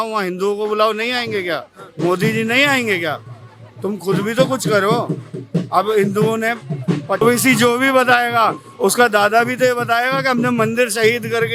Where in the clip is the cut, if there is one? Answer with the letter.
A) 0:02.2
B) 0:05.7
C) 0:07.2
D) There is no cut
C